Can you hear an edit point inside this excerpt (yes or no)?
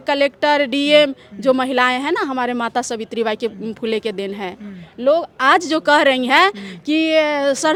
no